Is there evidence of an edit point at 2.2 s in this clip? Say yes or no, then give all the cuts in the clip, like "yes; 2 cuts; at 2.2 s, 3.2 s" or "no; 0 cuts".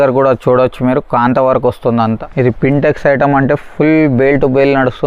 yes; 1 cut; at 2.2 s